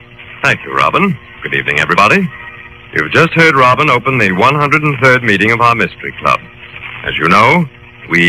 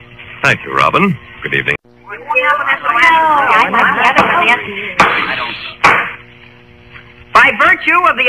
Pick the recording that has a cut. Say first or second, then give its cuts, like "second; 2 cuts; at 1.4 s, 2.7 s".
first; 1 cut; at 1.8 s